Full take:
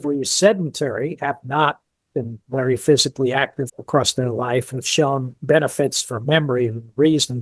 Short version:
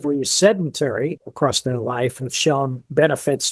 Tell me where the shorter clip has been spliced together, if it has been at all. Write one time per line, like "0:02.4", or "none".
0:01.2

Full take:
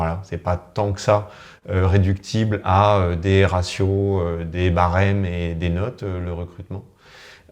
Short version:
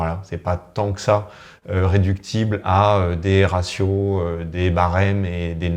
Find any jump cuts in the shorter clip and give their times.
none

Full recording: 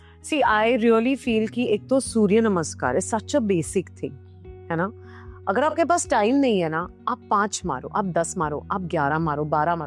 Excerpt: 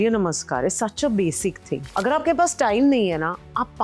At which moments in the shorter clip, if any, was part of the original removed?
0:01.9

